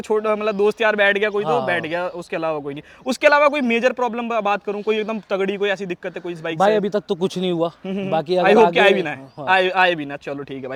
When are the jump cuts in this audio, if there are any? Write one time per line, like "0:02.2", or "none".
none